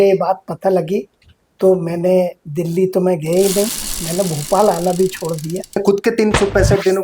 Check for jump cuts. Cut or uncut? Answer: cut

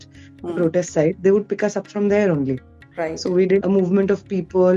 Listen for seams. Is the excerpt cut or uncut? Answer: cut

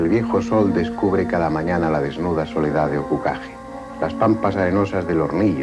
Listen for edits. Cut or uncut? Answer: cut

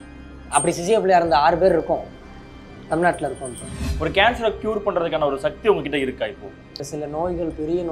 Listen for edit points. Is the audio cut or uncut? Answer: cut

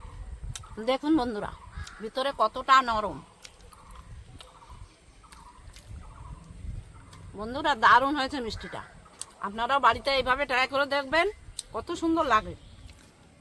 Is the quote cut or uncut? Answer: uncut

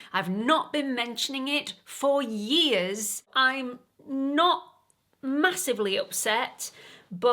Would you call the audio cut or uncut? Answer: cut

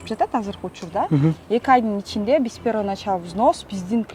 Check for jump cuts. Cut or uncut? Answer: uncut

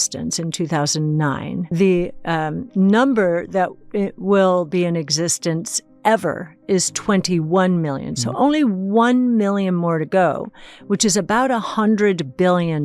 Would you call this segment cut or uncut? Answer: cut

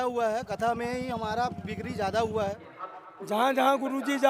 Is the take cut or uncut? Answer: cut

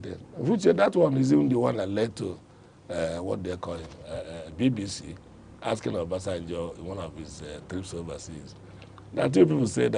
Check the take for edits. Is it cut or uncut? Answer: uncut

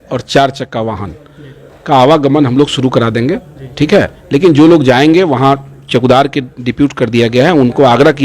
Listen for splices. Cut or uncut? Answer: uncut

